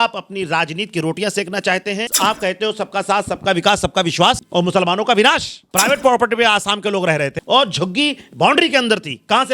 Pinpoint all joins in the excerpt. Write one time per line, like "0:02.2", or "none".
0:02.1
0:04.4
0:05.6
0:07.4

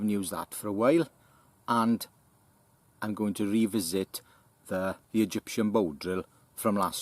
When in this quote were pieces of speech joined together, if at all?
0:05.0

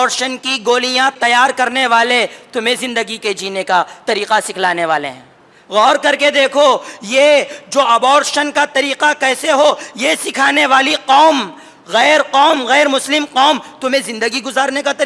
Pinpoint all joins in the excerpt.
0:01.2

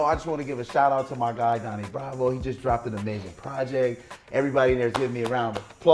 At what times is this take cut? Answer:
none

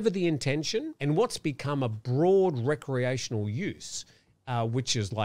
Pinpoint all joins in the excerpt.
0:00.9

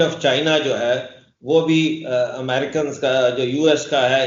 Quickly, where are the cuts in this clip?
none

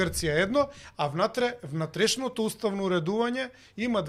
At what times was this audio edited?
none

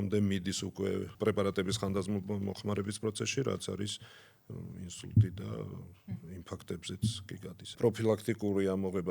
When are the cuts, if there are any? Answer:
0:01.1
0:07.8

